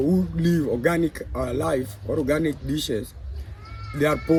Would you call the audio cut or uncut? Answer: uncut